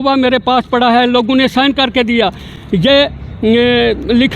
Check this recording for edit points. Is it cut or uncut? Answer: uncut